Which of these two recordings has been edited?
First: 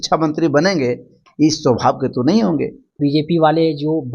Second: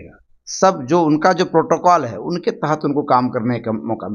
first; 1 cut; at 3.0 s

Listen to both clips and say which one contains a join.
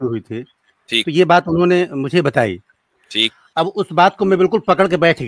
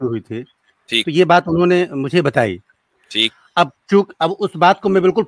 first; 1 cut; at 3.5 s

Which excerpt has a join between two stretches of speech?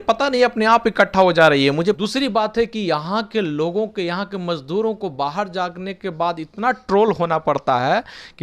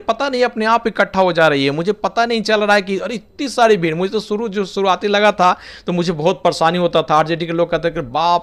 first; 1 cut; at 2.0 s

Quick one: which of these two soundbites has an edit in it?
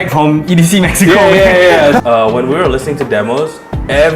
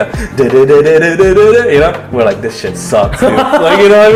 first; 1 cut; at 2.0 s

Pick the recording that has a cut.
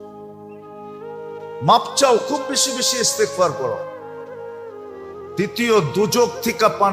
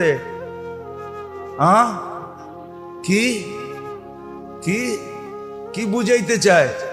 first; 2 cuts; at 3.9 s, 5.3 s

